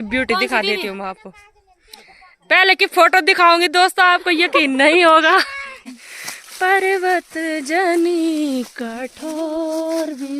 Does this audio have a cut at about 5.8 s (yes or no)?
yes